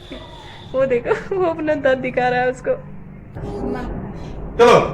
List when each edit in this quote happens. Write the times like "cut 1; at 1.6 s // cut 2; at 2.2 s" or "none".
cut 1; at 3.4 s